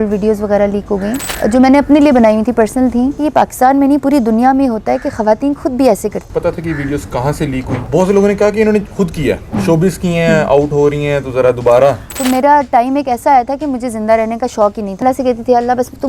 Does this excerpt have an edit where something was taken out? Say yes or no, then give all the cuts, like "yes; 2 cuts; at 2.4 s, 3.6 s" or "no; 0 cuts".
yes; 6 cuts; at 1.2 s, 3.2 s, 6.3 s, 7.8 s, 12.1 s, 15.0 s